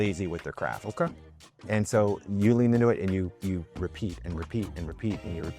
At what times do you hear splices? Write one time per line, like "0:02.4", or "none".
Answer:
0:01.5